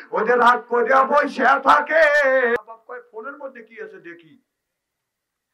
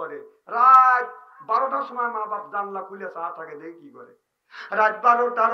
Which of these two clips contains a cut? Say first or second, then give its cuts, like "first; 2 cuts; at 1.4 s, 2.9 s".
first; 1 cut; at 2.6 s